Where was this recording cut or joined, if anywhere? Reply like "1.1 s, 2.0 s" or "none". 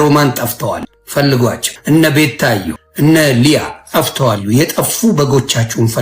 0.9 s, 1.7 s, 2.8 s

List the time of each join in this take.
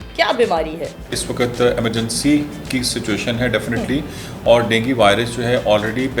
1.2 s

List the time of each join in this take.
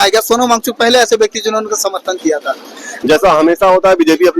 2.9 s

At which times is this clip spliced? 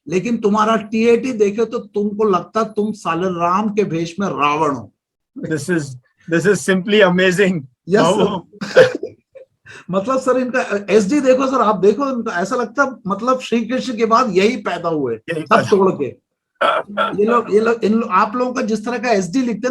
none

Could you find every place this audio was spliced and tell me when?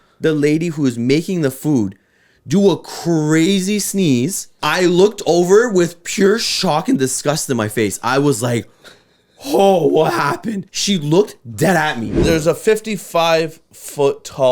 4.5 s, 10.7 s, 12.2 s

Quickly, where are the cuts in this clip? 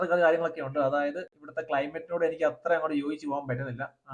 none

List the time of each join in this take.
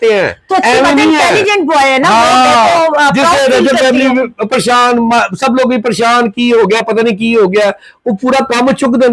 none

